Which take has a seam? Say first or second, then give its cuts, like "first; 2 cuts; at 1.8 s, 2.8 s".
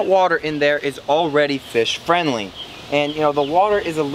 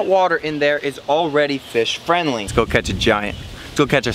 second; 1 cut; at 2.4 s